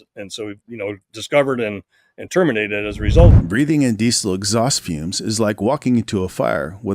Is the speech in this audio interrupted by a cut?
yes; 1 cut; at 3.3 s

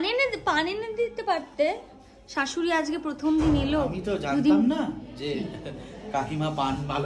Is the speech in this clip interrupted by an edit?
no; 0 cuts

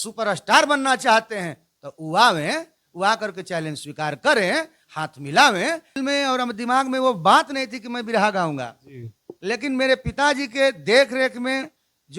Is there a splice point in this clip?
yes; 1 cut; at 5.9 s

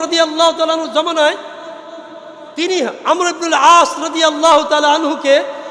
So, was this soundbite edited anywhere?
no; 0 cuts

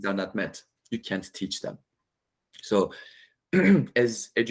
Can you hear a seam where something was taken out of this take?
no; 0 cuts

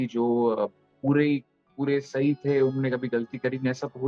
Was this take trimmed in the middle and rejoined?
no; 0 cuts

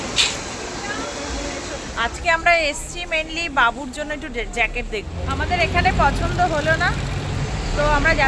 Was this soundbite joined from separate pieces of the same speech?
yes; 2 cuts; at 1.9 s, 5.3 s

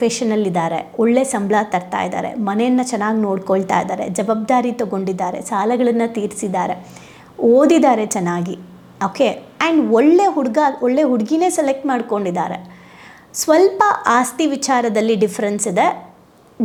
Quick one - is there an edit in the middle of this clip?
no; 0 cuts

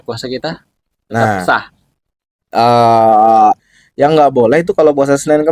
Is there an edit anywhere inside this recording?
yes; 1 cut; at 3.6 s

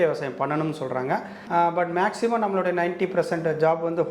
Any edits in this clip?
yes; 1 cut; at 1.3 s

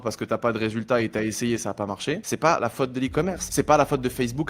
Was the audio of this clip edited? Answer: yes; 2 cuts; at 2.3 s, 3.4 s

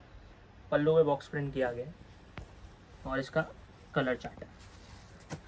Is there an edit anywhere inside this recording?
no; 0 cuts

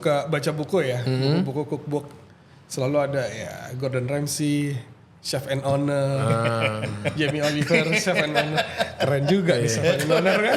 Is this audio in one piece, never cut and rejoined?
yes; 0 cuts

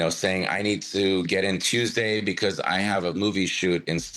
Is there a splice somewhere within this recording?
no; 0 cuts

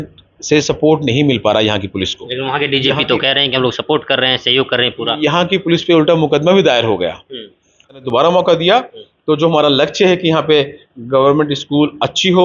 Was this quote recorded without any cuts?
no; 1 cut; at 8.0 s

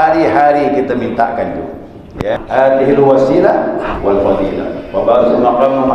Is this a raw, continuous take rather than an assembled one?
no; 1 cut; at 2.4 s

